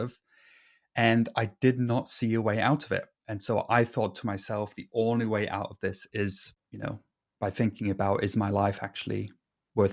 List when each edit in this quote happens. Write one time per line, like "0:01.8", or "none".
none